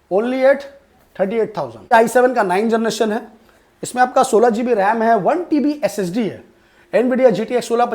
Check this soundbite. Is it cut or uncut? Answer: cut